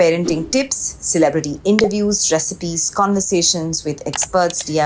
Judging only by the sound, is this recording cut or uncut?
uncut